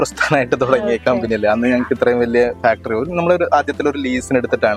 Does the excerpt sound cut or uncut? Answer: uncut